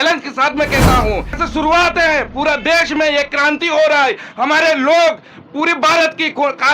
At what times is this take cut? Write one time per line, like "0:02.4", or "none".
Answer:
0:01.4